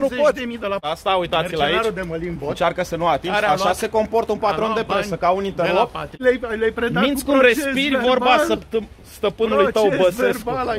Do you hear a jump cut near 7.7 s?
no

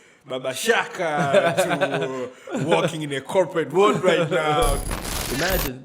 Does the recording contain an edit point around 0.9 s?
no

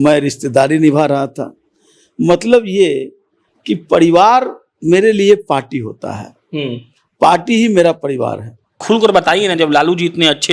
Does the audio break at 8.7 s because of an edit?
yes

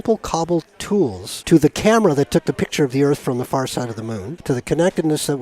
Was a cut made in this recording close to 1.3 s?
yes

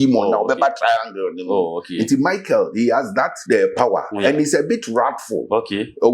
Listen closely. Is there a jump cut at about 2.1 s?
no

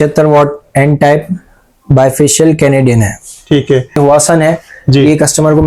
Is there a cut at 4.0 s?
yes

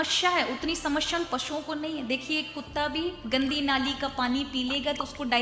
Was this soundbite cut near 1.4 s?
no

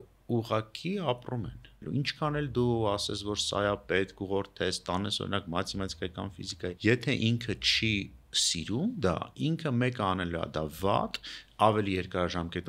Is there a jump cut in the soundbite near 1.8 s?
yes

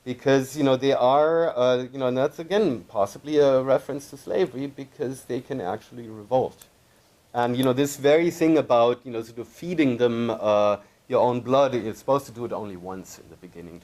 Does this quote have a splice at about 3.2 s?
yes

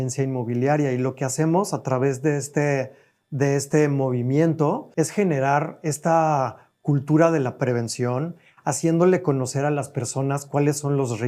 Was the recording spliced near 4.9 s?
yes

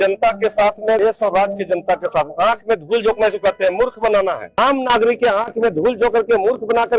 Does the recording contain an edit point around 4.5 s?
yes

